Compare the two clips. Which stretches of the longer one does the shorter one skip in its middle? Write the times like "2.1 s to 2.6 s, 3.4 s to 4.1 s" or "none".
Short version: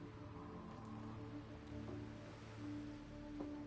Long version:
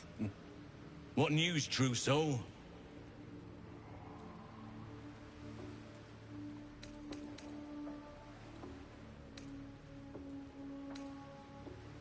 none